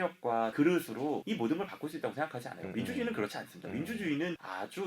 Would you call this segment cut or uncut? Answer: uncut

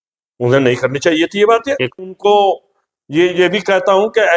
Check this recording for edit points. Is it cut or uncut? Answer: cut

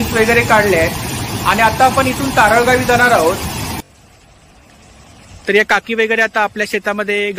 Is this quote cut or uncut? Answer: cut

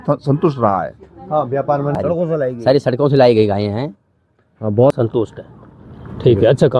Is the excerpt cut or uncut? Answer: cut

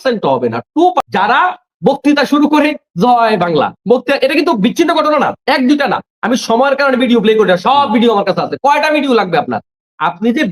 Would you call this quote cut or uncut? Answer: cut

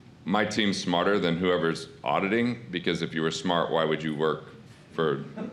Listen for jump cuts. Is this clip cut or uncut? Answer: uncut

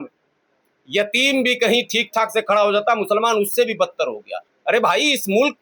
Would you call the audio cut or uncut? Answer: cut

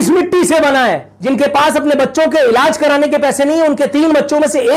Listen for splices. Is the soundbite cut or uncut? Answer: cut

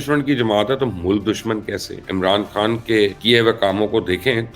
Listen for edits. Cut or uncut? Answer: cut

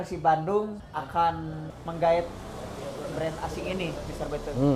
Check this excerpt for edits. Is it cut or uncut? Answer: cut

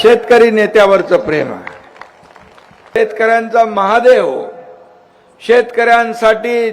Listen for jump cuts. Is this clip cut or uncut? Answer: cut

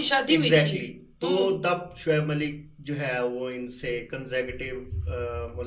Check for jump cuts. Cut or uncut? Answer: uncut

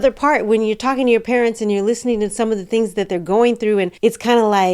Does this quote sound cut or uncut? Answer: uncut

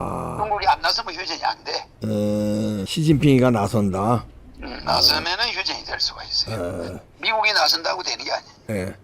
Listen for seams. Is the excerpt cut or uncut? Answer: cut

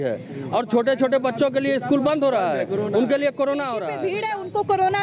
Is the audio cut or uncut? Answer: cut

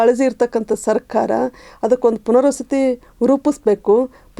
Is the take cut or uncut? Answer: uncut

